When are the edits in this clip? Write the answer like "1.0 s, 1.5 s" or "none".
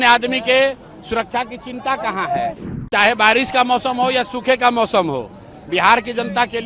2.7 s